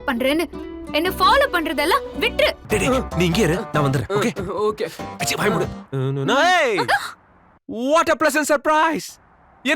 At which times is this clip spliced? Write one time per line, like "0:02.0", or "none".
0:02.6
0:05.9